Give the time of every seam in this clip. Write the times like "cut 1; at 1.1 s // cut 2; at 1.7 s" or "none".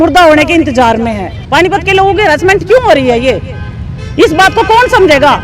cut 1; at 1.5 s